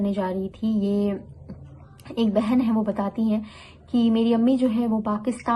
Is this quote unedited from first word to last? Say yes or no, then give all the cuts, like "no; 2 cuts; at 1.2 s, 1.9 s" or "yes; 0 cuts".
yes; 0 cuts